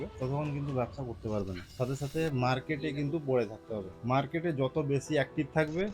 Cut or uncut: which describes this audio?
uncut